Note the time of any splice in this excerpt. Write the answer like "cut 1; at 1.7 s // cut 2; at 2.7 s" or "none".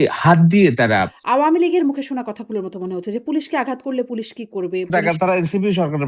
cut 1; at 1.2 s // cut 2; at 4.9 s